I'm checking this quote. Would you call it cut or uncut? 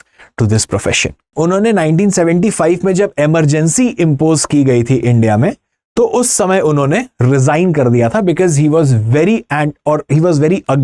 cut